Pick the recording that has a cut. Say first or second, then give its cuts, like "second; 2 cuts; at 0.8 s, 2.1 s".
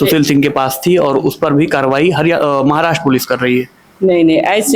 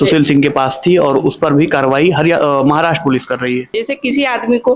second; 1 cut; at 3.9 s